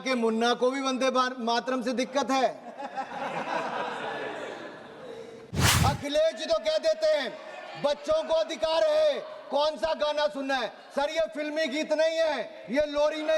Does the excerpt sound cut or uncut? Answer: cut